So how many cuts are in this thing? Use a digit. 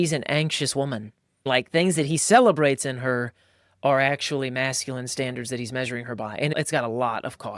2